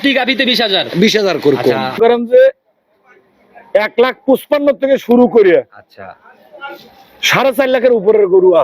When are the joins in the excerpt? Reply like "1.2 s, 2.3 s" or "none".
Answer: 1.9 s